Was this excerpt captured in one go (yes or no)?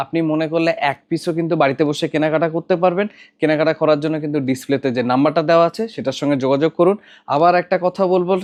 yes